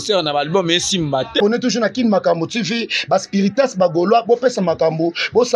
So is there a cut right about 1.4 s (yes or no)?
yes